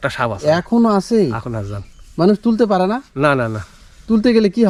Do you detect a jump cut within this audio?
no; 0 cuts

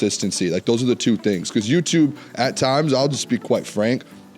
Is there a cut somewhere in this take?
no; 0 cuts

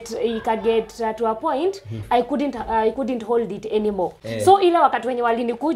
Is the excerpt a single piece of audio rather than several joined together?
yes; 0 cuts

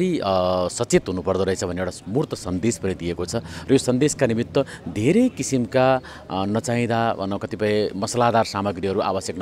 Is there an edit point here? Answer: no; 0 cuts

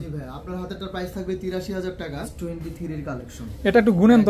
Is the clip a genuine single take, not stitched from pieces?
no; 1 cut; at 2.3 s

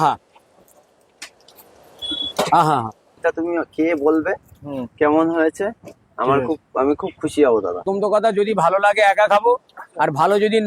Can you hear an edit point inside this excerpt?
yes; 2 cuts; at 3.2 s, 7.8 s

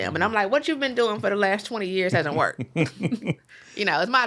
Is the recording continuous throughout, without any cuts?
yes; 0 cuts

